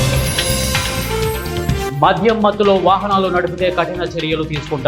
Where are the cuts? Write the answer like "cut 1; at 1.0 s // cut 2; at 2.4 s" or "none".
cut 1; at 1.9 s